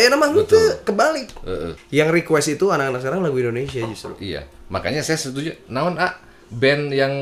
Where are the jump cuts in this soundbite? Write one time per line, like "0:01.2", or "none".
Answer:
none